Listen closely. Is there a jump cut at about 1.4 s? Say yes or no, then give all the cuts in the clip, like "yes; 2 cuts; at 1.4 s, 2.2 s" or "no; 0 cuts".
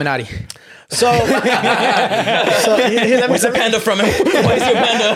no; 0 cuts